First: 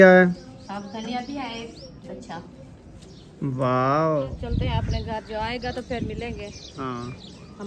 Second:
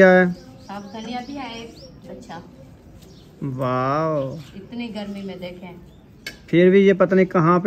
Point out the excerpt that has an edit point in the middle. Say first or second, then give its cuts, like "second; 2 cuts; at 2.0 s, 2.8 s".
first; 1 cut; at 4.4 s